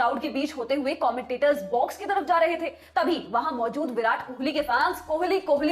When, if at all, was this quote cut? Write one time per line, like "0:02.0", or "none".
none